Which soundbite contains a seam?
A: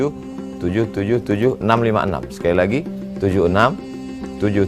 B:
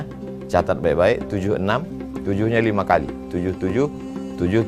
A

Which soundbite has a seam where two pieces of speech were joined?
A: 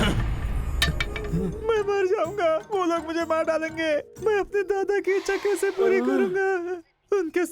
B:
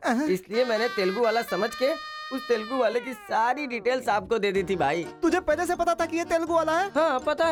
A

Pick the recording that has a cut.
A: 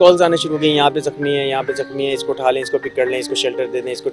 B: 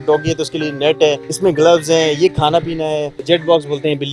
B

